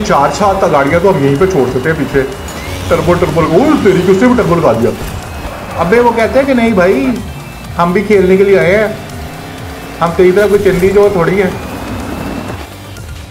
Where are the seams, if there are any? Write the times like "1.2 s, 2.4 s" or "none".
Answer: none